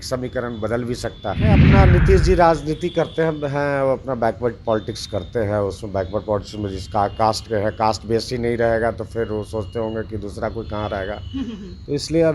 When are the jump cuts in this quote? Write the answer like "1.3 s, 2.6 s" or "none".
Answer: 1.6 s